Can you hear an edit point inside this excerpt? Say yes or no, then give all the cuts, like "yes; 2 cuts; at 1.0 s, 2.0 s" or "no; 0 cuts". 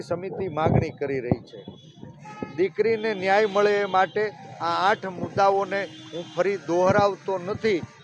no; 0 cuts